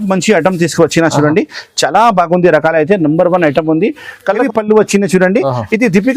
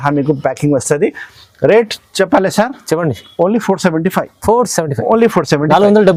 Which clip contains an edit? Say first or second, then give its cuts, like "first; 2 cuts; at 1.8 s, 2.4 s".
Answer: first; 1 cut; at 4.4 s